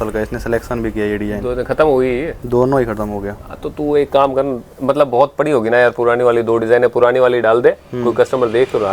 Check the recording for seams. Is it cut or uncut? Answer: uncut